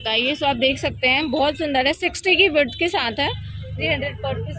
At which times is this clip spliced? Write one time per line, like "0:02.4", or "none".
none